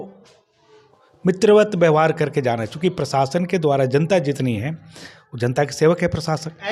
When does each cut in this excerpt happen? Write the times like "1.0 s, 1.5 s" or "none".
none